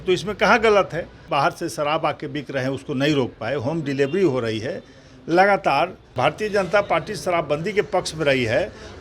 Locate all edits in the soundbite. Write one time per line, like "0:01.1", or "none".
0:01.2
0:06.1